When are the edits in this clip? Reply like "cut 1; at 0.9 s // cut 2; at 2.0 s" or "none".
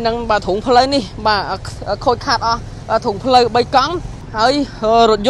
cut 1; at 4.2 s